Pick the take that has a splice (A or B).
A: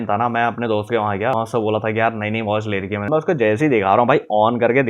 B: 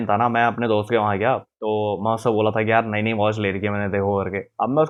A